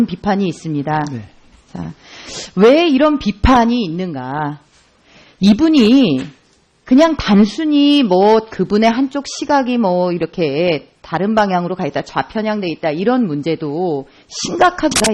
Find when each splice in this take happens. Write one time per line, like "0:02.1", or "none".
0:13.7